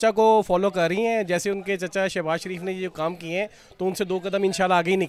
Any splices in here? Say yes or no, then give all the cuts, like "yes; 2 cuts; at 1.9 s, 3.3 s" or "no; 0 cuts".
no; 0 cuts